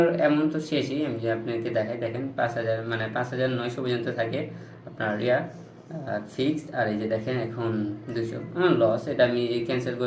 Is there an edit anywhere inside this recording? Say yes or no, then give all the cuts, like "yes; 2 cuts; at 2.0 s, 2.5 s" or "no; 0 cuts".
no; 0 cuts